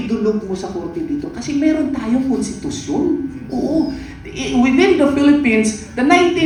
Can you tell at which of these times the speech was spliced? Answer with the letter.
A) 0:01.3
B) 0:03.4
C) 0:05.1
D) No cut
D